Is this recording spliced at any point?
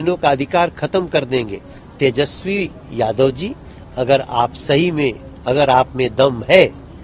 no; 0 cuts

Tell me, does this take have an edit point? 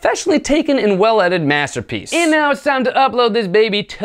yes; 1 cut; at 2.1 s

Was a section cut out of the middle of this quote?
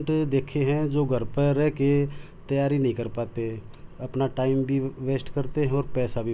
no; 0 cuts

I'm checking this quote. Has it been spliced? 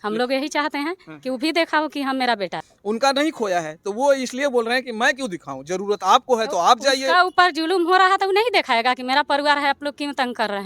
yes; 1 cut; at 2.7 s

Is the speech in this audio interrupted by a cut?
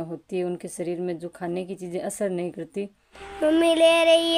yes; 1 cut; at 3.4 s

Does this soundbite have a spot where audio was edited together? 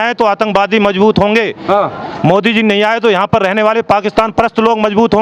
no; 0 cuts

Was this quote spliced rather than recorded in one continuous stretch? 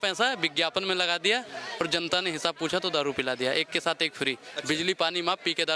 no; 0 cuts

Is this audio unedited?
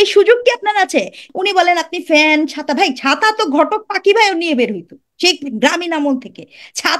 no; 1 cut; at 1.2 s

